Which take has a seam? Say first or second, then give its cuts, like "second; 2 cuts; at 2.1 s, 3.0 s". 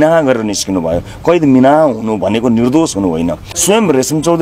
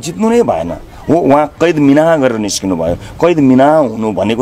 first; 1 cut; at 3.5 s